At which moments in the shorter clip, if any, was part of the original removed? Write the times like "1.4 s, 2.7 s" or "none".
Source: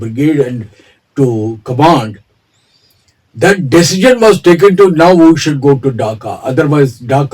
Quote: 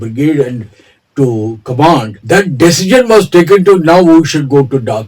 2.1 s

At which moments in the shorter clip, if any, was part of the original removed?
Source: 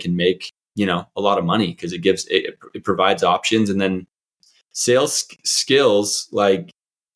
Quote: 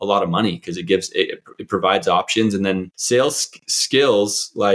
2.9 s

